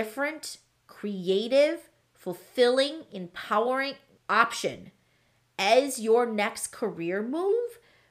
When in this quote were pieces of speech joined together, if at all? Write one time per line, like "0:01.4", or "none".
0:04.1